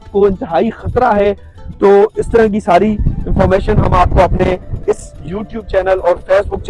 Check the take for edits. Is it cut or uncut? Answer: uncut